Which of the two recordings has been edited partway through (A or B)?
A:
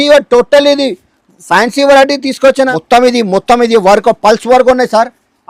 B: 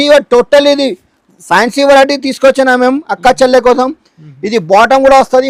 A